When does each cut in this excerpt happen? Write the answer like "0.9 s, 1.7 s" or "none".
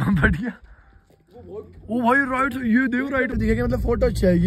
3.3 s